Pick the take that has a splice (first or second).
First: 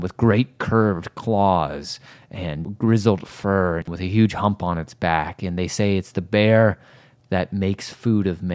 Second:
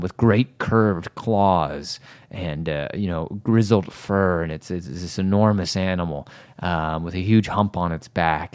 first